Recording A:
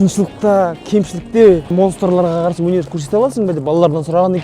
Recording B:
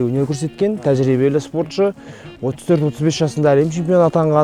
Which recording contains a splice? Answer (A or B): A